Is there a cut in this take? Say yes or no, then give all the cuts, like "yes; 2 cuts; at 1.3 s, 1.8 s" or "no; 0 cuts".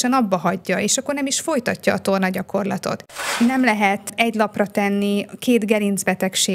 yes; 1 cut; at 3.2 s